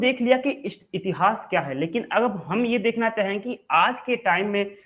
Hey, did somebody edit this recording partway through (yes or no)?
no